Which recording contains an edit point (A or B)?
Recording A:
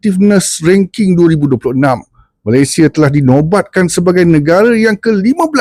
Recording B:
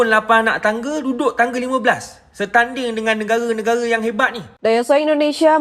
B